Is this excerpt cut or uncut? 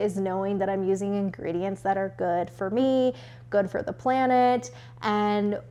uncut